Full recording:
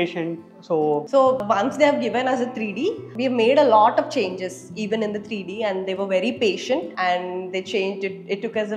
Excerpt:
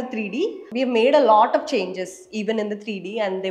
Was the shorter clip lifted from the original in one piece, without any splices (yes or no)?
yes